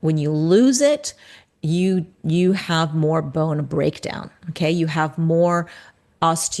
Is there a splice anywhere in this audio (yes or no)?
no